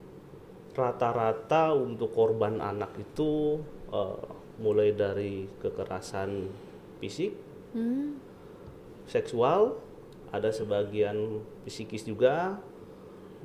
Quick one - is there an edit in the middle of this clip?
no; 0 cuts

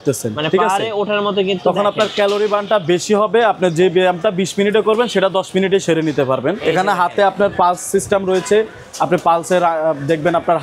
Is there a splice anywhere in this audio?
yes; 1 cut; at 6.6 s

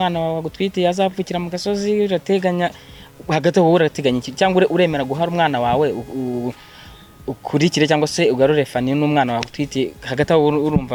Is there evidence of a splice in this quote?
no; 0 cuts

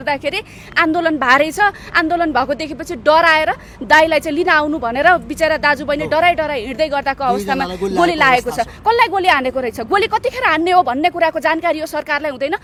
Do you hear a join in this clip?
no; 0 cuts

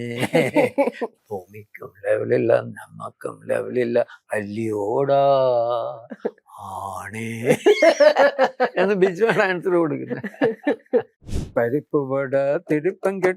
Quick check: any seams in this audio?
yes; 2 cuts; at 1.1 s, 11.6 s

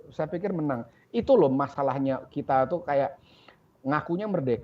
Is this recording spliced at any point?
no; 0 cuts

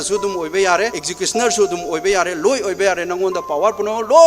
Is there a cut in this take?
yes; 1 cut; at 1.0 s

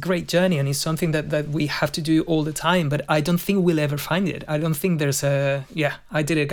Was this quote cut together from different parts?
no; 0 cuts

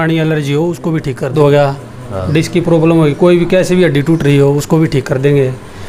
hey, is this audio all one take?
no; 1 cut; at 1.3 s

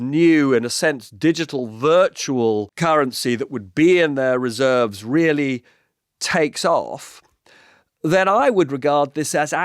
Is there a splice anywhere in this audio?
yes; 1 cut; at 2.7 s

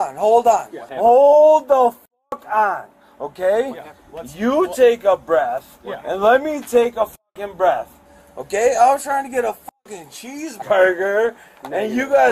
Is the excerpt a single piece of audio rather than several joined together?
yes; 0 cuts

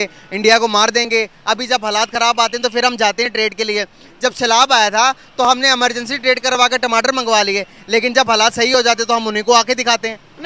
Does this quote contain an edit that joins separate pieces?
no; 0 cuts

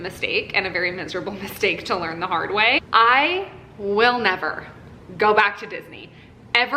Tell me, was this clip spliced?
yes; 1 cut; at 2.8 s

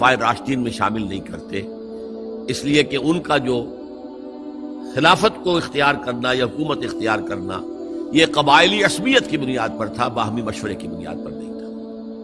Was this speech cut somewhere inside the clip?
yes; 1 cut; at 10.9 s

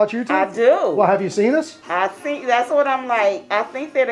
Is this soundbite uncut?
yes; 0 cuts

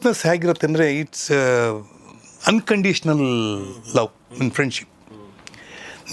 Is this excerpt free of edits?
yes; 0 cuts

